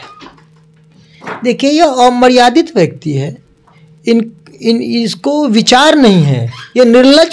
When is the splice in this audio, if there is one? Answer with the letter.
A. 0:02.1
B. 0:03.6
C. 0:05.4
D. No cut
D